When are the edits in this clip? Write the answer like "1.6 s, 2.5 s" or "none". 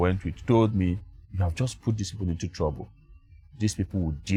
none